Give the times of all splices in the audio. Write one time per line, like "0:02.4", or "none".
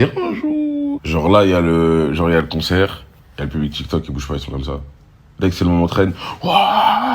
0:01.0